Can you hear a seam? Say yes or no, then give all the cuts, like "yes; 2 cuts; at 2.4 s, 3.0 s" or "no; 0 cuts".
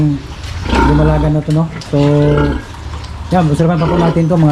no; 0 cuts